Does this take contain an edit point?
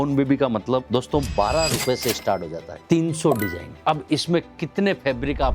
yes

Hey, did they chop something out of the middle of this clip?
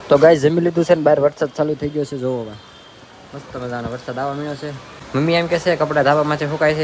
yes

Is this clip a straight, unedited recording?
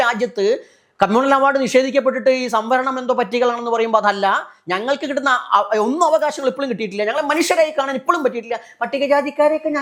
yes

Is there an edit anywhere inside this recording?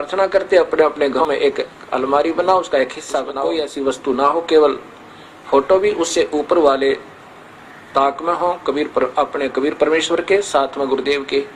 yes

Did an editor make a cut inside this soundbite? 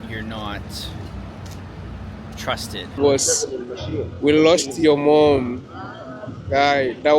yes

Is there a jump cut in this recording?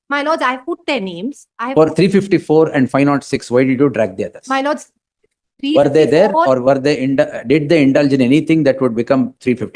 no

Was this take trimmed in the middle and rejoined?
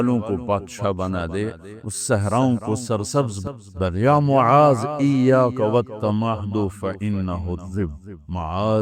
yes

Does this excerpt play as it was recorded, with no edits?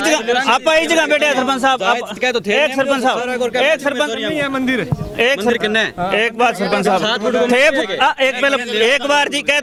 yes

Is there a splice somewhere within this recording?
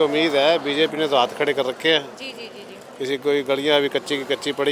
no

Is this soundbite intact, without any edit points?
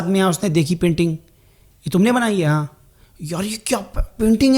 yes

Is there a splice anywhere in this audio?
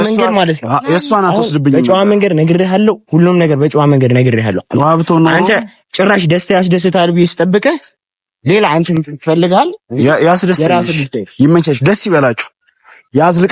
no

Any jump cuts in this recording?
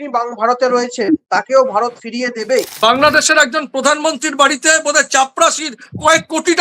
yes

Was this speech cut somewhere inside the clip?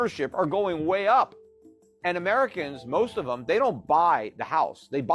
no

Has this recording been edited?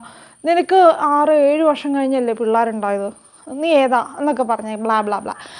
no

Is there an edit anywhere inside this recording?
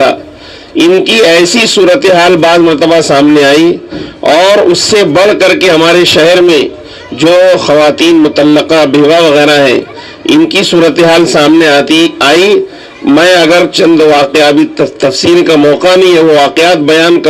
no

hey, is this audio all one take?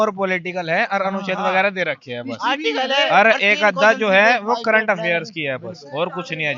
yes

